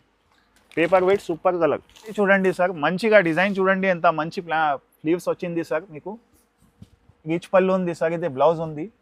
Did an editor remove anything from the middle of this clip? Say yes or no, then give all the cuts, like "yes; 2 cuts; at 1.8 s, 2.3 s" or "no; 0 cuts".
yes; 1 cut; at 2.1 s